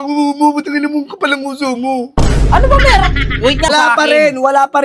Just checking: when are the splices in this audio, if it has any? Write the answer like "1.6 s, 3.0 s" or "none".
3.7 s